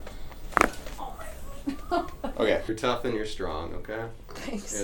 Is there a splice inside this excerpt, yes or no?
yes